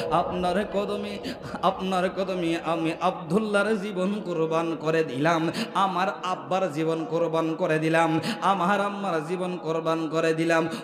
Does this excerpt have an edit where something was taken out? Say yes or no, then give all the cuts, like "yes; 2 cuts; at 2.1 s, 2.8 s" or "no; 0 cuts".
no; 0 cuts